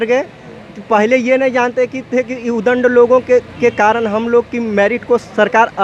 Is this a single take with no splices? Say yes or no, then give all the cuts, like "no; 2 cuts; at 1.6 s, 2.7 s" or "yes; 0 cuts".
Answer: yes; 0 cuts